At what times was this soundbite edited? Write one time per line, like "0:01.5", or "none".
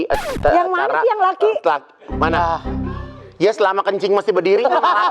none